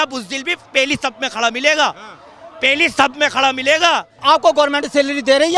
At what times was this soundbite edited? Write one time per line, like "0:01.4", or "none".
0:04.1